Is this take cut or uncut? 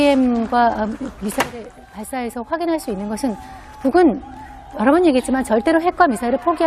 uncut